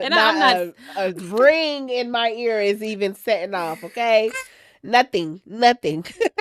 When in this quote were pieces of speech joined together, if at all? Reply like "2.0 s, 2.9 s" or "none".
none